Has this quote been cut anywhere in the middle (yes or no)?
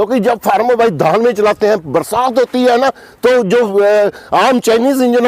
no